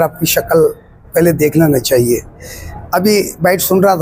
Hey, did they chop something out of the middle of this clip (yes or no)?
no